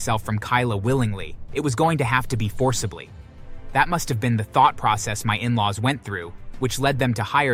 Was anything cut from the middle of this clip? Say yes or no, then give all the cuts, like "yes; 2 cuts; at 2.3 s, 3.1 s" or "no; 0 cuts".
no; 0 cuts